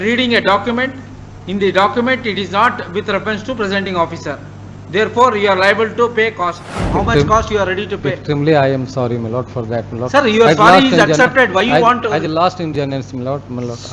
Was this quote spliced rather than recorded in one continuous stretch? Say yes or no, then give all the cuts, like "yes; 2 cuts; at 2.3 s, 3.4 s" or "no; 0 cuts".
yes; 1 cut; at 6.8 s